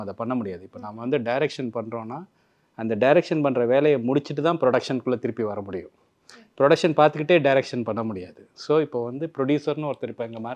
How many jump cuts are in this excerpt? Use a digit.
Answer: 0